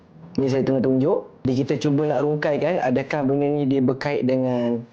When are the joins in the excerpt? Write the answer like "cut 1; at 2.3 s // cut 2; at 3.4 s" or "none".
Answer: cut 1; at 1.4 s

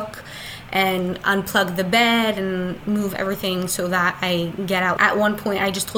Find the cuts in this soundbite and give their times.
cut 1; at 5.0 s

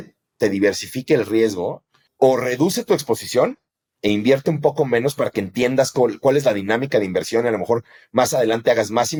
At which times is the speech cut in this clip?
none

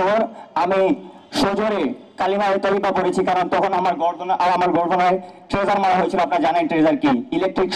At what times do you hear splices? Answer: none

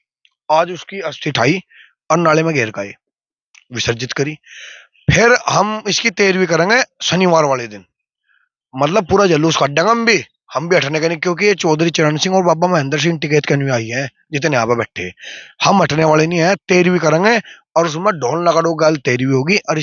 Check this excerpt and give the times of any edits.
none

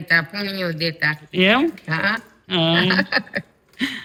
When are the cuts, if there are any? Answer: none

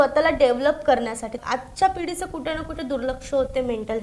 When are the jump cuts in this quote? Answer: cut 1; at 1.4 s

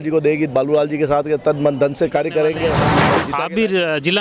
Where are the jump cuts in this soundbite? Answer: cut 1; at 3.1 s

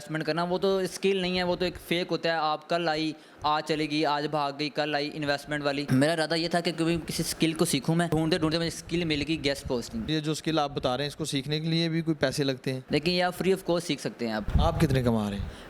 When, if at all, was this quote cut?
cut 1; at 5.9 s // cut 2; at 8.1 s // cut 3; at 10.0 s // cut 4; at 14.5 s

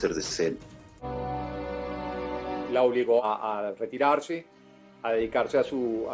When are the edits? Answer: cut 1; at 1.0 s // cut 2; at 3.2 s

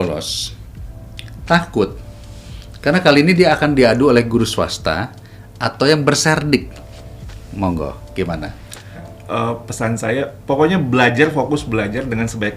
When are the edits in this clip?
cut 1; at 9.1 s

